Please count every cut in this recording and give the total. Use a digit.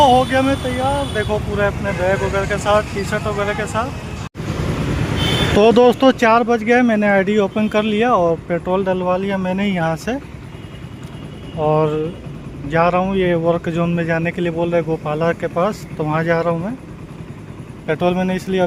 0